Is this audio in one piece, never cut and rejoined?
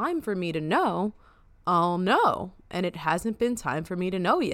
yes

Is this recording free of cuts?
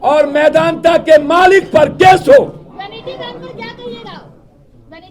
yes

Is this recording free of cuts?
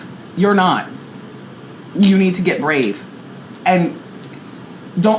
yes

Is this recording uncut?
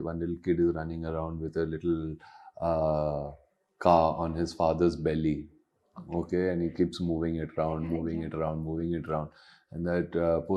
yes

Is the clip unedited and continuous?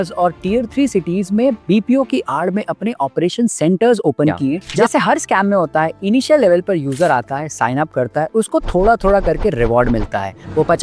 no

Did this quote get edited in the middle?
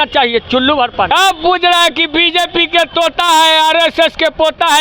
yes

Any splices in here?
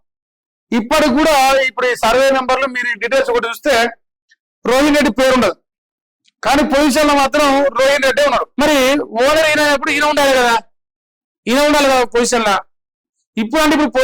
yes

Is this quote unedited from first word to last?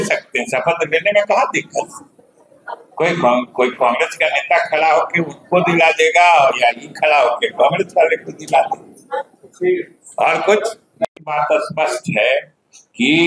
yes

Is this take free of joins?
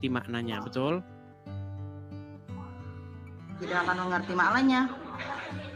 yes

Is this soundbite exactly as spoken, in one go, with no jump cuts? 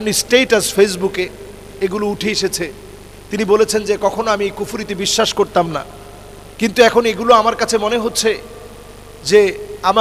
yes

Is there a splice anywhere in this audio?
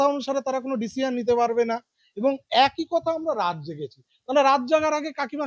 no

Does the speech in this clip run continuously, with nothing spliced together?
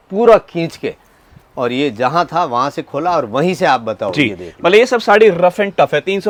yes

